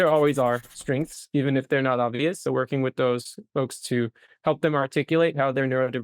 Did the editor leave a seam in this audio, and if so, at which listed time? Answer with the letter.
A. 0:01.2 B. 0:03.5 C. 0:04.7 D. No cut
D